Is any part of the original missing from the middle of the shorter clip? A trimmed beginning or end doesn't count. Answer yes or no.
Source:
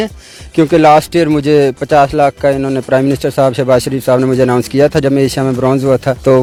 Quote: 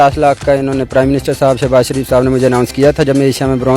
no